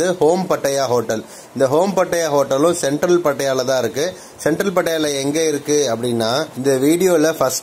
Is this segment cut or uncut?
uncut